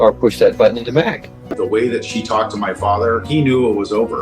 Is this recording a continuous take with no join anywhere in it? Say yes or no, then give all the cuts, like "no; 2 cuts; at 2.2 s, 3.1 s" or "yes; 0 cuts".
no; 1 cut; at 1.3 s